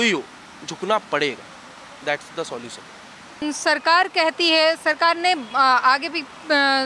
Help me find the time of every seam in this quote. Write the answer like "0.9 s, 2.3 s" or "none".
none